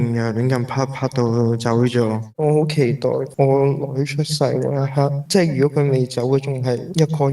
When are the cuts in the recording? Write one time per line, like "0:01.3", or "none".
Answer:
0:02.3